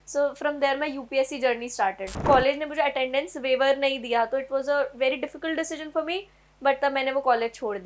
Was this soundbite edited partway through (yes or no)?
yes